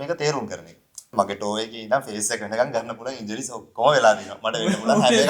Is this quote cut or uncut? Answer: cut